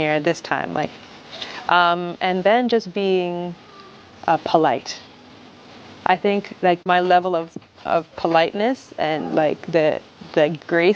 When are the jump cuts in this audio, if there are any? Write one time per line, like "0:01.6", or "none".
0:06.8